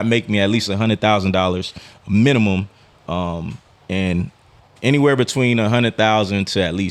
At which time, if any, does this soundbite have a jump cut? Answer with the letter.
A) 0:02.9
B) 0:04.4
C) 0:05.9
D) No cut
D